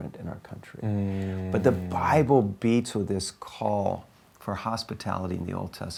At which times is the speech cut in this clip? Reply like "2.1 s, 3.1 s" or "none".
none